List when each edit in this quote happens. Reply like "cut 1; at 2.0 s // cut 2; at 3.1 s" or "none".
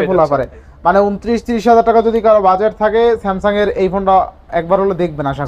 none